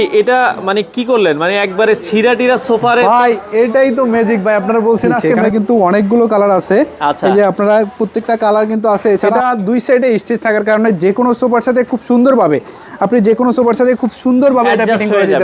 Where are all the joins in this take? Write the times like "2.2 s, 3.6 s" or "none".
5.4 s, 9.3 s